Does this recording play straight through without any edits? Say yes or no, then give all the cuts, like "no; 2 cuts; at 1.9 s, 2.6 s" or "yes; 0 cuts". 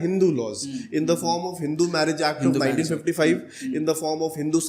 yes; 0 cuts